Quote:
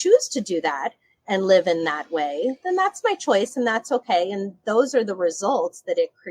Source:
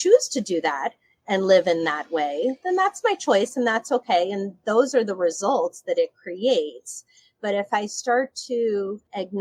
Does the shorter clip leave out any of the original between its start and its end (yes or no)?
no